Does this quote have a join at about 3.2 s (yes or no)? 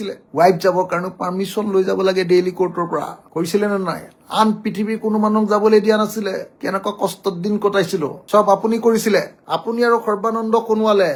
no